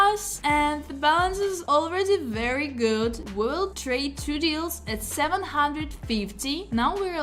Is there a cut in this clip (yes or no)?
no